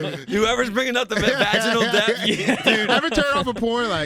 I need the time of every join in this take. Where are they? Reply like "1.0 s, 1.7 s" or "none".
none